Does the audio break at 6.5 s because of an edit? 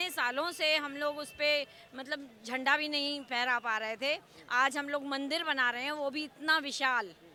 no; 0 cuts

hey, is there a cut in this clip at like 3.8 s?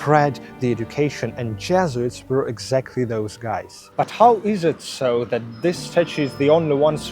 yes; 1 cut; at 3.8 s

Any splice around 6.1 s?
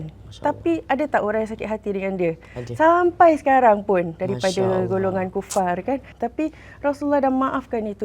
yes; 1 cut; at 6.1 s

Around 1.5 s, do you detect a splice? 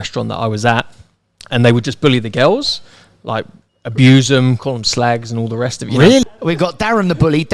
no; 1 cut; at 6.2 s

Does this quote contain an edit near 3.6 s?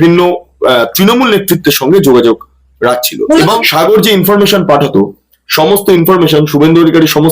yes; 1 cut; at 3.6 s

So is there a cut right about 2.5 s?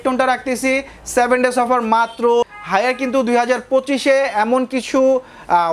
yes; 1 cut; at 2.5 s

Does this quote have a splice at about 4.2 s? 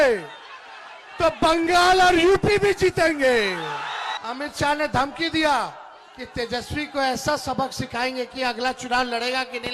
yes; 1 cut; at 4.2 s

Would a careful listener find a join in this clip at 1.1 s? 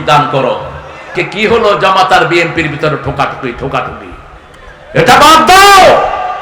yes; 1 cut; at 1.1 s

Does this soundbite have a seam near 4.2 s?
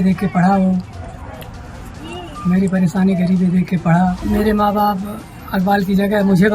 yes; 1 cut; at 4.2 s

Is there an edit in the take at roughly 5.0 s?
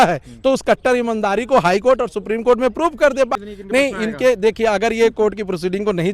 no; 1 cut; at 3.3 s

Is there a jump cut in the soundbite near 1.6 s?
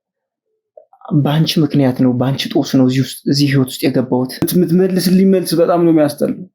no; 1 cut; at 4.4 s

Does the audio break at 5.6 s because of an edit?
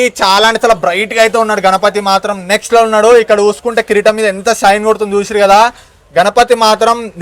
no; 0 cuts

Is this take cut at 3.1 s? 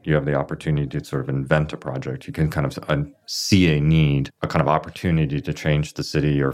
no; 1 cut; at 4.3 s

